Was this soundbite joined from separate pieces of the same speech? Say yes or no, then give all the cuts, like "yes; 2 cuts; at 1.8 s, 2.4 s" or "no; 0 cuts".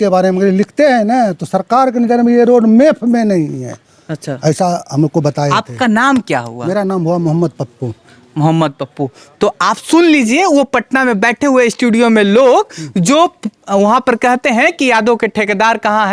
no; 0 cuts